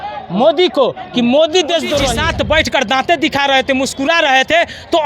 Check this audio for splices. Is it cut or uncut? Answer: cut